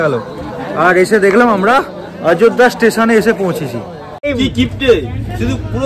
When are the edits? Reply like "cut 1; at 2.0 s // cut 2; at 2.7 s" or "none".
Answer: cut 1; at 4.3 s